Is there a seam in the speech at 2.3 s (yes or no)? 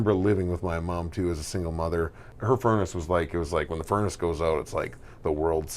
yes